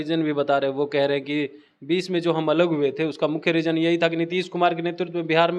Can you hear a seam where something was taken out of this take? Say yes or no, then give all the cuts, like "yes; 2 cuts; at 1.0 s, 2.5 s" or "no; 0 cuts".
no; 0 cuts